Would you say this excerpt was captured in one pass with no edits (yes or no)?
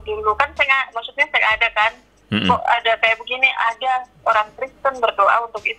yes